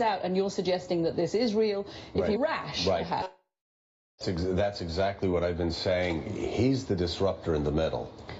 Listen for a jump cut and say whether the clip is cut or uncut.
uncut